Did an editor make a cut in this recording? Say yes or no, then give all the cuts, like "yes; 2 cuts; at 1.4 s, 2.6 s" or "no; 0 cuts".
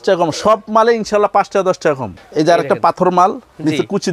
yes; 1 cut; at 2.2 s